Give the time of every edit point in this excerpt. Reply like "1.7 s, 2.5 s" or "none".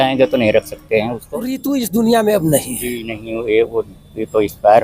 1.6 s